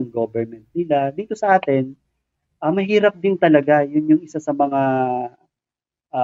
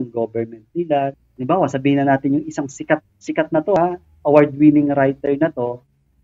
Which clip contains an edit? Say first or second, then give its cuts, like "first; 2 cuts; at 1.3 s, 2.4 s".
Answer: second; 1 cut; at 1.2 s